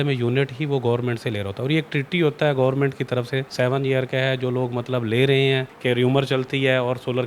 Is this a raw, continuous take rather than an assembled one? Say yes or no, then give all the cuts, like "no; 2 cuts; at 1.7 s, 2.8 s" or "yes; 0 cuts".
no; 2 cuts; at 3.5 s, 5.7 s